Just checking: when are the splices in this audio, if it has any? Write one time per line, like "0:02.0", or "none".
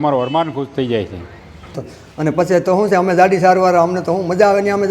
0:01.7